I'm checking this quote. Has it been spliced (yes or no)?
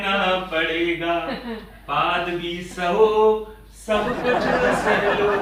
no